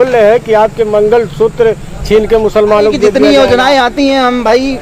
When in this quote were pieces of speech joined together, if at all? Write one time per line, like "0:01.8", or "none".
0:03.2